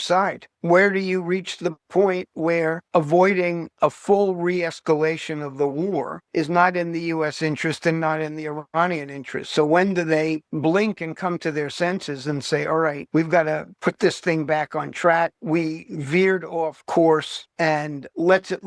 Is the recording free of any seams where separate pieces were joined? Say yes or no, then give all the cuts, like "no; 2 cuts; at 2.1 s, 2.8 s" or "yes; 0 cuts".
no; 1 cut; at 6.2 s